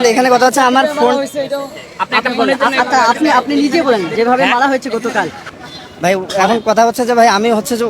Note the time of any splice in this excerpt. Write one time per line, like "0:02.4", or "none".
0:05.4